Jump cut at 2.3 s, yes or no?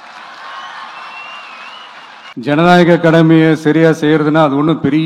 yes